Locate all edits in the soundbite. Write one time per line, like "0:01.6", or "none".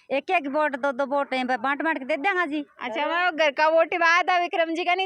none

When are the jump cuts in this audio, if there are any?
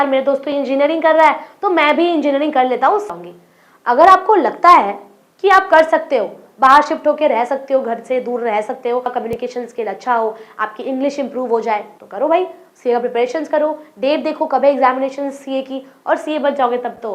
0:03.1
0:09.1
0:12.0

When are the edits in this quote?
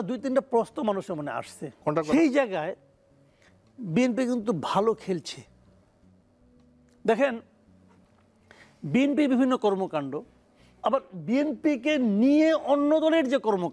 0:02.1

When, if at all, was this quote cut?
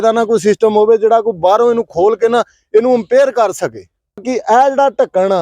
0:04.3

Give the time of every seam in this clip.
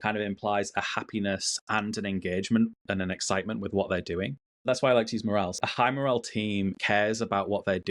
0:04.6
0:05.5
0:06.8

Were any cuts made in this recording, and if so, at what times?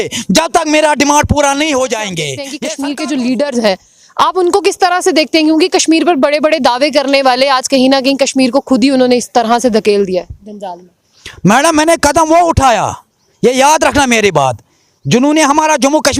0:02.4

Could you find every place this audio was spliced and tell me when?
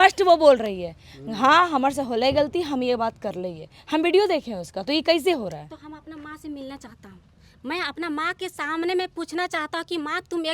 none

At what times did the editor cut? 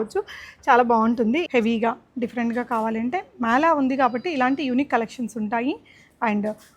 0:01.5

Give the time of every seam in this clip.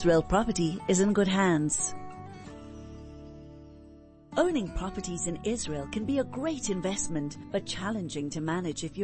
0:01.8
0:04.2

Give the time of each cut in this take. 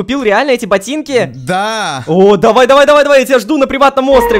none

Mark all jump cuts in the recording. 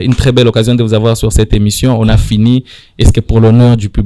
none

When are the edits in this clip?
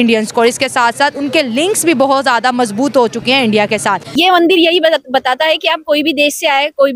0:04.1

